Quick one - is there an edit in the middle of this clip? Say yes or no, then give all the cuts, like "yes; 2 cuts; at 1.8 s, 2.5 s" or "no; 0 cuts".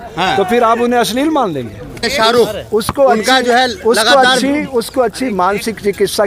yes; 1 cut; at 2.0 s